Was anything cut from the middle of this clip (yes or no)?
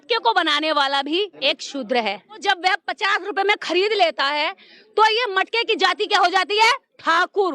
yes